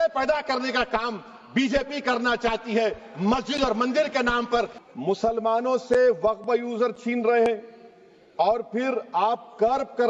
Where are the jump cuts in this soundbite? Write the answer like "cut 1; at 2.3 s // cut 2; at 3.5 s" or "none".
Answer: cut 1; at 4.8 s